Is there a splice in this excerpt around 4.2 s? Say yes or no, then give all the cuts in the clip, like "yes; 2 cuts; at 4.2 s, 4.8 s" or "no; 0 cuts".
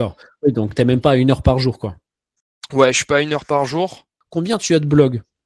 yes; 1 cut; at 4.2 s